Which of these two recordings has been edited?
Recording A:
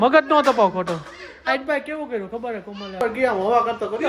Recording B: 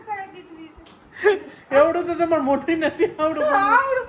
A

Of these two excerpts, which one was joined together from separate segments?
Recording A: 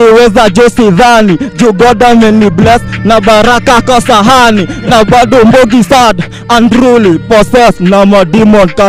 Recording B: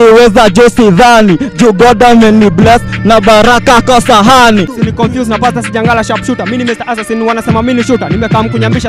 B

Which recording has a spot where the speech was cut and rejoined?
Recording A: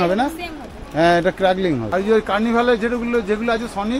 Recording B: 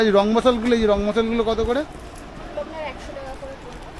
A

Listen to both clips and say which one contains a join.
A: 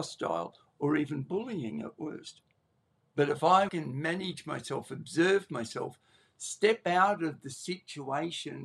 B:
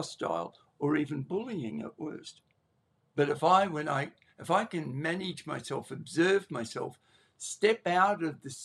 A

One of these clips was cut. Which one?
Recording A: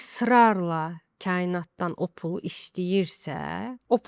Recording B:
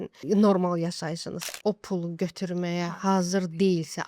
B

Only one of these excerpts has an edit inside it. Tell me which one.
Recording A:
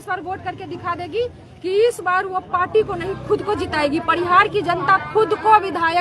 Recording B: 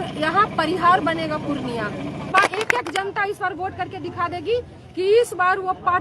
B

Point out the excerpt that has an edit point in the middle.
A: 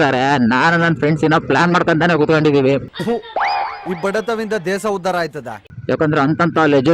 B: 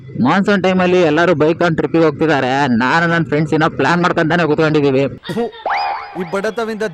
A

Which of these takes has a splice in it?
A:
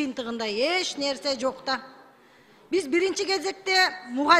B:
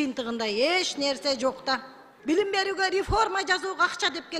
B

